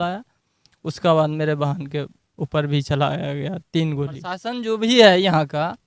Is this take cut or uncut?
cut